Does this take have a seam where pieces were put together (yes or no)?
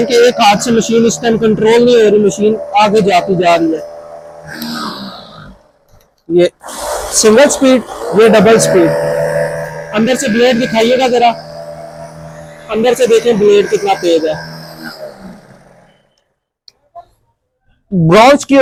no